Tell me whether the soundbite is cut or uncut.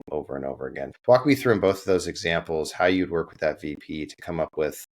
cut